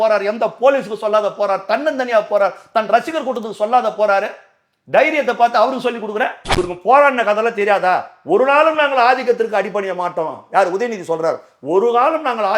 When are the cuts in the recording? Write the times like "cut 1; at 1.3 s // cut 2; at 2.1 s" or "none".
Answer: cut 1; at 6.4 s